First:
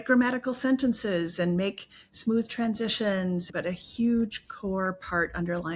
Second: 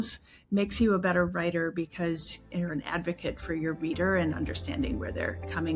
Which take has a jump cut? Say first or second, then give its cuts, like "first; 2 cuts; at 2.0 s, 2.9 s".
first; 1 cut; at 3.5 s